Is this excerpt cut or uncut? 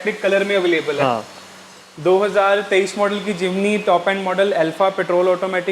uncut